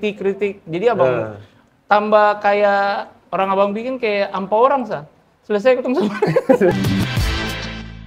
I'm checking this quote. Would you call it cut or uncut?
cut